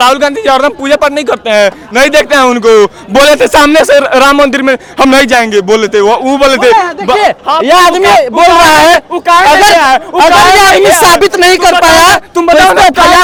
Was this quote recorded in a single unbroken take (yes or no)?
yes